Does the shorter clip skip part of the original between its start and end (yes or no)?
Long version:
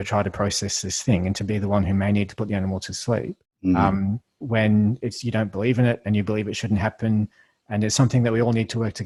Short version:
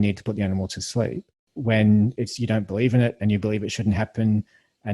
yes